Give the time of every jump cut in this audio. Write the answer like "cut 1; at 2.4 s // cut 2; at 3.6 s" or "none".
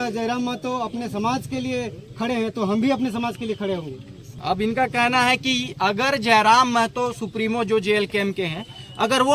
cut 1; at 4.4 s